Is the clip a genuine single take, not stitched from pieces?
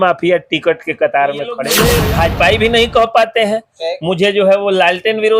no; 1 cut; at 1.6 s

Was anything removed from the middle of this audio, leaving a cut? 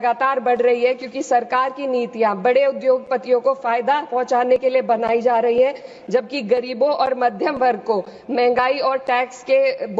no; 0 cuts

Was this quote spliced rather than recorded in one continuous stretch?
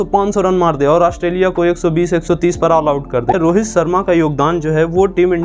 yes; 1 cut; at 3.3 s

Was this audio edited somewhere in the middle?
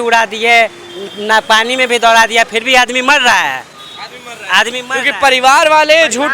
no; 0 cuts

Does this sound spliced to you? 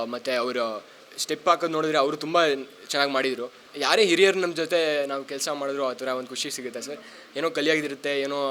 yes; 1 cut; at 3.7 s

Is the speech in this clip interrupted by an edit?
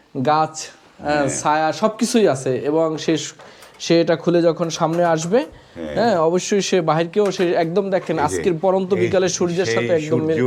no; 0 cuts

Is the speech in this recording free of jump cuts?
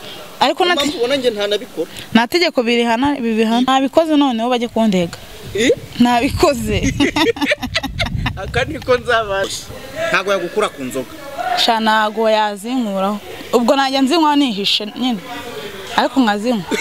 no; 2 cuts; at 3.7 s, 9.5 s

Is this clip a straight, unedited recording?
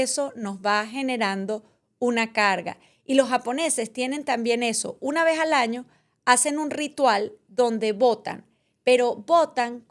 yes; 0 cuts

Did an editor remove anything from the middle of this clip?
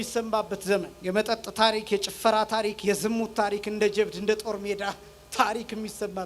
yes; 1 cut; at 0.9 s

